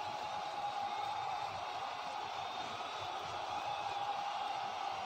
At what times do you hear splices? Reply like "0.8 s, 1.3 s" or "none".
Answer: none